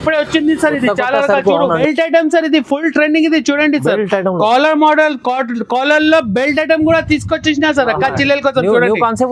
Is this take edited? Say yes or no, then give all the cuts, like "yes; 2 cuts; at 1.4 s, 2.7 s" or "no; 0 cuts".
yes; 1 cut; at 1.8 s